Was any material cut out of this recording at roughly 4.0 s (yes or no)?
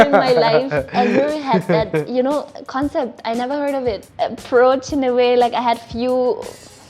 yes